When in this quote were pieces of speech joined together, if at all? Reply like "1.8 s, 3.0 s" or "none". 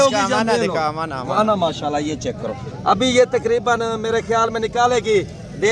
none

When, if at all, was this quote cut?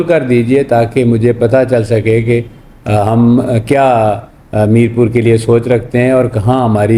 none

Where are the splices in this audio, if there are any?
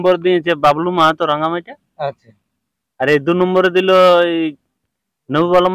none

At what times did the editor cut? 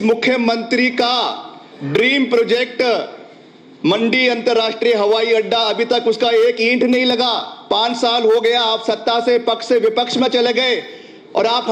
none

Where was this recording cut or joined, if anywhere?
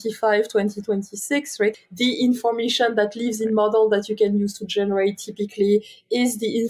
1.7 s

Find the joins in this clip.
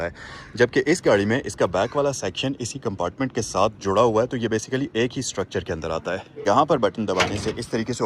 6.3 s

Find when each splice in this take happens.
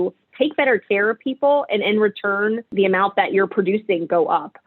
2.7 s

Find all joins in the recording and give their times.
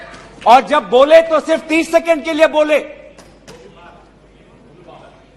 none

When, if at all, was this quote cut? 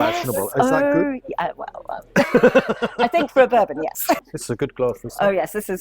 4.2 s

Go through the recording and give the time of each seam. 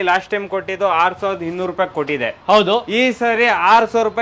none

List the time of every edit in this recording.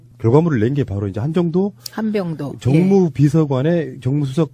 none

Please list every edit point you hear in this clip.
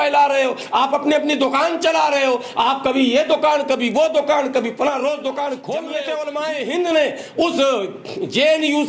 5.9 s

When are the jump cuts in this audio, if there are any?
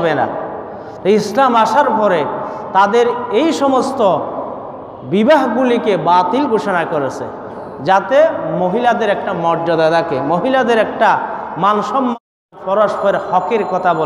12.2 s

